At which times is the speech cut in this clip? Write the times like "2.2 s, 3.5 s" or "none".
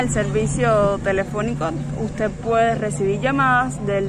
none